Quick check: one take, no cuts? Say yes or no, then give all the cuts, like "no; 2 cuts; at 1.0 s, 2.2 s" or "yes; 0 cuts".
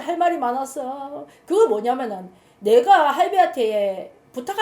yes; 0 cuts